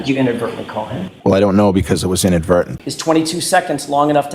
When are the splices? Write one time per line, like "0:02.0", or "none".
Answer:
0:01.0
0:02.8